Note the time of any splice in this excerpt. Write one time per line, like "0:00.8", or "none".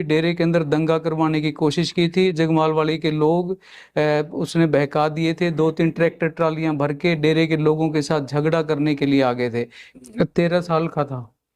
0:09.8